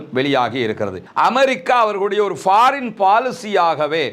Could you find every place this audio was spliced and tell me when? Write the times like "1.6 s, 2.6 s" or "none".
1.1 s